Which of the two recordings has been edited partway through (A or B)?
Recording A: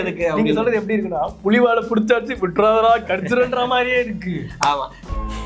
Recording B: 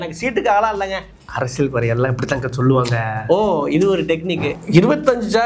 B